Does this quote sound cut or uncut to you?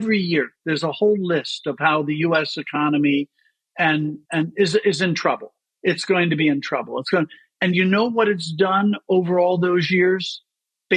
uncut